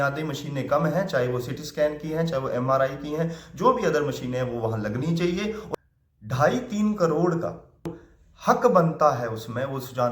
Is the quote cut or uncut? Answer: cut